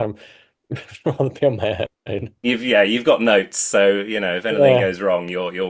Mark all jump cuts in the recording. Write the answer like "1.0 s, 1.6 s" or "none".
2.5 s